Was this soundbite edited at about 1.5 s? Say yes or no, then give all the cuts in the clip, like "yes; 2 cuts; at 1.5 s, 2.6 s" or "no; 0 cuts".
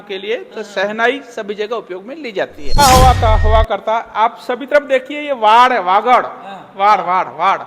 no; 1 cut; at 2.8 s